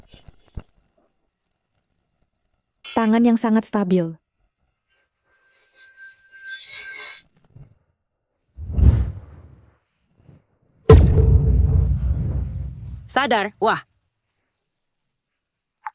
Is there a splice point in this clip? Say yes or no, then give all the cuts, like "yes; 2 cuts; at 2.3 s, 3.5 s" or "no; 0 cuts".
yes; 2 cuts; at 1.3 s, 2.9 s